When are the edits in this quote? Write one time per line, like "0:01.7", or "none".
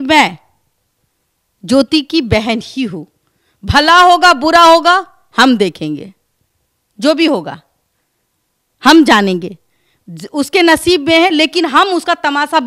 none

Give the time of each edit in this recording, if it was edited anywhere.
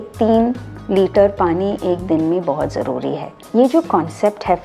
0:03.4

